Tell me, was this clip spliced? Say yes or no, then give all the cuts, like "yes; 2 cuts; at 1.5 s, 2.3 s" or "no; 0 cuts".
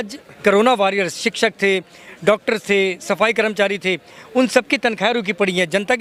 no; 0 cuts